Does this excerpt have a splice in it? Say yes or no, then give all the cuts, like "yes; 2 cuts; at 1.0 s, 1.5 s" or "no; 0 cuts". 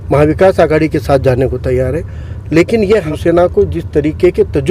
yes; 1 cut; at 3.1 s